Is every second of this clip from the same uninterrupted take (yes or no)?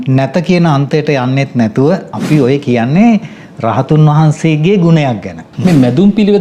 no